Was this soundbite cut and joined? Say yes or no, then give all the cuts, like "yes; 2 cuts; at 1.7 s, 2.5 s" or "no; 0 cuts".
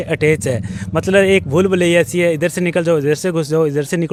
no; 0 cuts